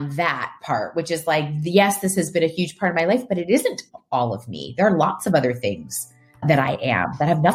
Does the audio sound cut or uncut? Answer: cut